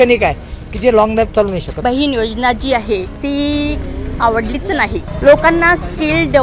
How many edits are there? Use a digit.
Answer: 3